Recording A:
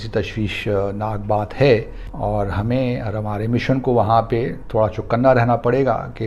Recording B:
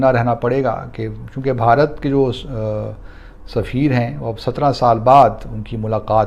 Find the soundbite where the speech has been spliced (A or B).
A